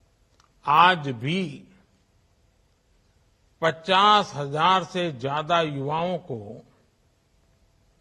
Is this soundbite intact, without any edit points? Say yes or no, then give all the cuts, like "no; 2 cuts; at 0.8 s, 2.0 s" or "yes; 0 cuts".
yes; 0 cuts